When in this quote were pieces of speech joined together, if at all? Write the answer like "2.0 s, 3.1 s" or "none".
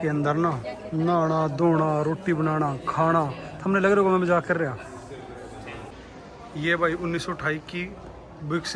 5.9 s